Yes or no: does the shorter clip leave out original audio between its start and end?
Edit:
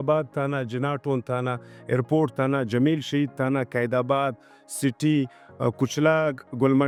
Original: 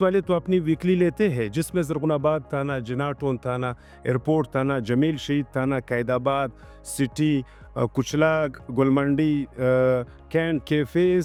no